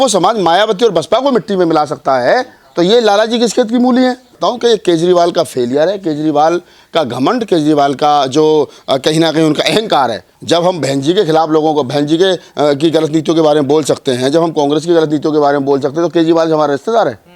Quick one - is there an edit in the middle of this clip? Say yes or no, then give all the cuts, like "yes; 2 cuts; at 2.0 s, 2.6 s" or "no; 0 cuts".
yes; 2 cuts; at 4.3 s, 10.3 s